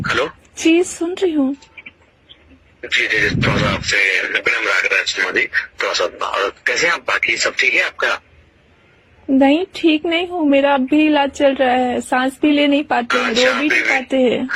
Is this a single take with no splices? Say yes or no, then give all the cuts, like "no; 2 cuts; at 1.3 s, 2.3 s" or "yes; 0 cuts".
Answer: yes; 0 cuts